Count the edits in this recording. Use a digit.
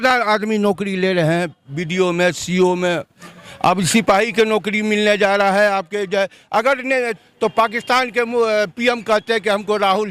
1